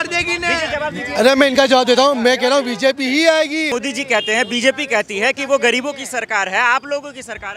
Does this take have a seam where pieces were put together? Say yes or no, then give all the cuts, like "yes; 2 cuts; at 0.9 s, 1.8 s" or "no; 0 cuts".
yes; 1 cut; at 3.7 s